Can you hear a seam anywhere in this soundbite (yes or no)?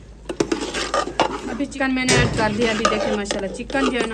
yes